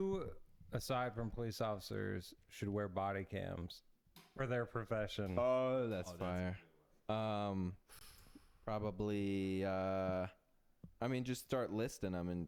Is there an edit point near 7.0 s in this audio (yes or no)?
no